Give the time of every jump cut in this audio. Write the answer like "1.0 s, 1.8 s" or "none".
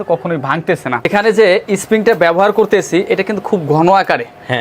1.1 s